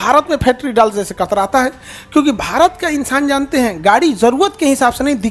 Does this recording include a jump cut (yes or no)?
no